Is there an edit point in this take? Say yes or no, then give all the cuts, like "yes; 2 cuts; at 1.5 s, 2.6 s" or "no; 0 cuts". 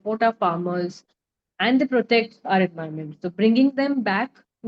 no; 0 cuts